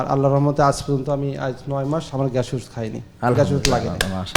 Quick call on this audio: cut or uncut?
uncut